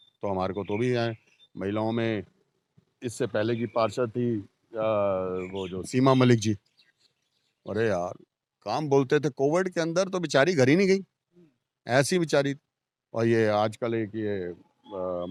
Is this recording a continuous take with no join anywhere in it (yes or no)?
yes